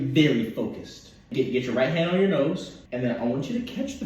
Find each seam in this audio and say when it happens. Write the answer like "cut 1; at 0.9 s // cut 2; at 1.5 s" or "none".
cut 1; at 1.3 s // cut 2; at 2.8 s